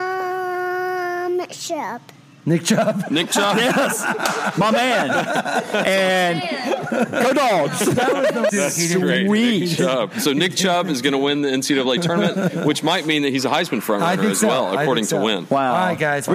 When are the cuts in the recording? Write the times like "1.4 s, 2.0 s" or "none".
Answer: 8.5 s